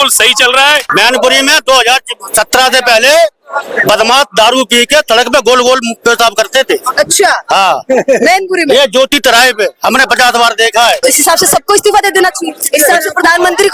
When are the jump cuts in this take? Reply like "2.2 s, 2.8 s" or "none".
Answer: 0.9 s, 11.0 s, 12.6 s